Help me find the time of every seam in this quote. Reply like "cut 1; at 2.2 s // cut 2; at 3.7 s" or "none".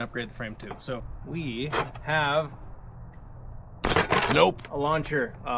cut 1; at 1.2 s